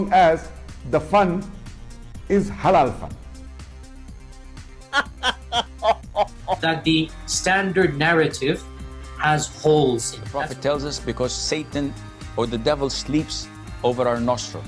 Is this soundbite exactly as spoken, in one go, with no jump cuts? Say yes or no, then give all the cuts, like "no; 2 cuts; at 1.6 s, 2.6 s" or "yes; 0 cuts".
yes; 0 cuts